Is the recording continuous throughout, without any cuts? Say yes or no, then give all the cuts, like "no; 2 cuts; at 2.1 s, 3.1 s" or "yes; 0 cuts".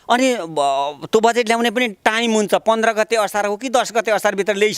yes; 0 cuts